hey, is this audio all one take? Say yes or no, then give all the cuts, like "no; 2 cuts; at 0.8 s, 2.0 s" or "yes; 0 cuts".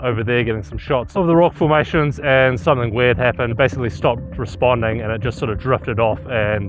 no; 2 cuts; at 1.1 s, 3.5 s